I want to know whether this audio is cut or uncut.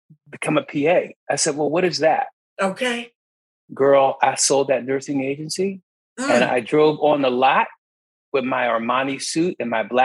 cut